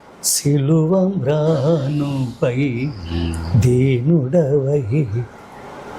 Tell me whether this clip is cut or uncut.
uncut